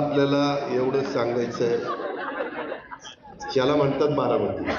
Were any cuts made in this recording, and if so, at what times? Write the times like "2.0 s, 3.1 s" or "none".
none